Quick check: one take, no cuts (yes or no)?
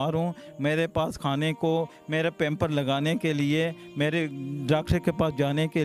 yes